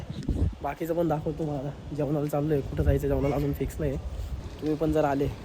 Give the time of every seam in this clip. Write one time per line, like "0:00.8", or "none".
0:04.0